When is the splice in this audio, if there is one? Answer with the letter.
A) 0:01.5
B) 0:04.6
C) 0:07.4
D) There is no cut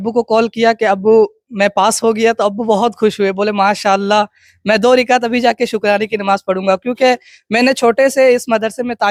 D